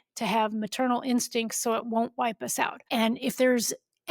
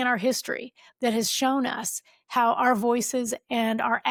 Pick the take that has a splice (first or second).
first